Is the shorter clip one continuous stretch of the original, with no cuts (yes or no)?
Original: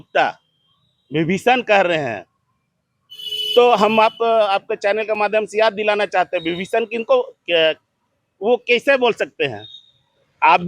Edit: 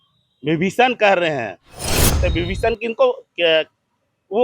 no